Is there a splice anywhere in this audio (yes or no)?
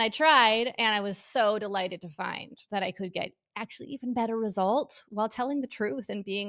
no